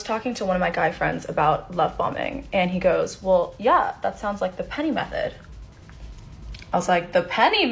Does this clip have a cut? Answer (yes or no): no